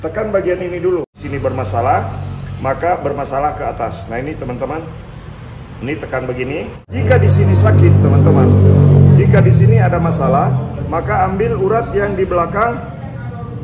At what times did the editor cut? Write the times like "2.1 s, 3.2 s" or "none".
1.2 s, 6.9 s